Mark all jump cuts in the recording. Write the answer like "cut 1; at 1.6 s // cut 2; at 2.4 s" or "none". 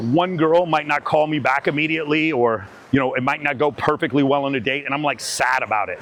none